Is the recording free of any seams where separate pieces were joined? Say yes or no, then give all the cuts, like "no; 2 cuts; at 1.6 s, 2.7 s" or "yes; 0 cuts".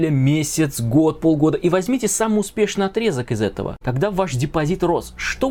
no; 1 cut; at 3.8 s